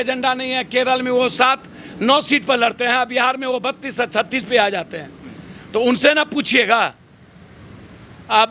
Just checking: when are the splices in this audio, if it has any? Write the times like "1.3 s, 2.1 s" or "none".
none